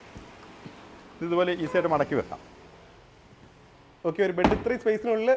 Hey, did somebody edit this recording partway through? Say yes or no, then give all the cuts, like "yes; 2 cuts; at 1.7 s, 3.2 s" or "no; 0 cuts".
no; 0 cuts